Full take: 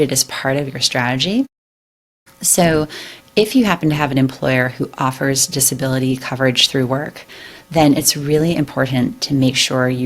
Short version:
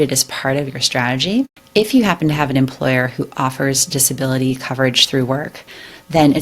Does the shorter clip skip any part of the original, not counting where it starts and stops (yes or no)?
yes